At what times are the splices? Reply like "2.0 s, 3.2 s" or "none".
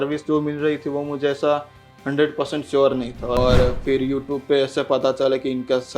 3.4 s